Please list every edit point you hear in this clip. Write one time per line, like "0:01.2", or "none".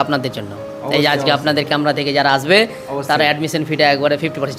none